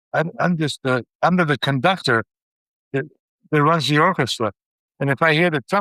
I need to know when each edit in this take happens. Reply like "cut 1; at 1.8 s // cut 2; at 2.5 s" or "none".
none